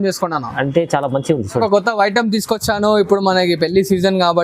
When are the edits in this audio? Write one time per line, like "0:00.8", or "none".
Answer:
0:01.6